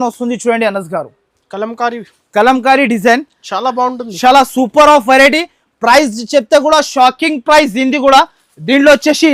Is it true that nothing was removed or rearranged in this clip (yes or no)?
yes